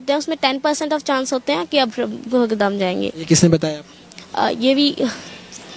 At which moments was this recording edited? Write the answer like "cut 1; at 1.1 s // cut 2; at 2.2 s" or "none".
none